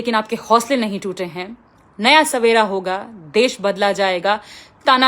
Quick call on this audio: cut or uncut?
uncut